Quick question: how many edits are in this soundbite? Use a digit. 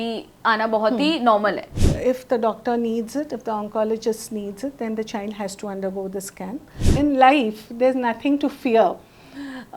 2